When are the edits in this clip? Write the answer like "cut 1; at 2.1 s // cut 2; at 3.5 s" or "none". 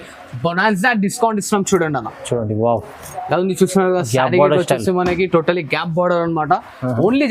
none